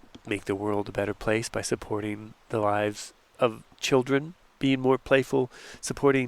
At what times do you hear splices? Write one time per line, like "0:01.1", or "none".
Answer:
0:04.4